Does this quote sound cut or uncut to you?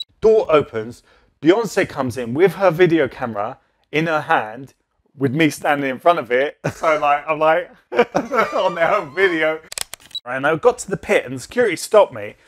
cut